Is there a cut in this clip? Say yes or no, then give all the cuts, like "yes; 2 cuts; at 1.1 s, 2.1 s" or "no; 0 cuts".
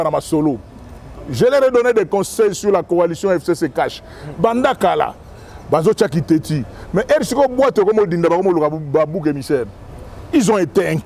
no; 0 cuts